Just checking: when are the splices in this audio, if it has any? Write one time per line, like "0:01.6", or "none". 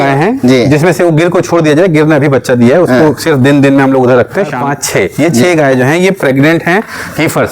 0:04.7